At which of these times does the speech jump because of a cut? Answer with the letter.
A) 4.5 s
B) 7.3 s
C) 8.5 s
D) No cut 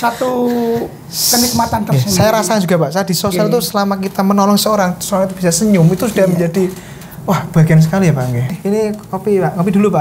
C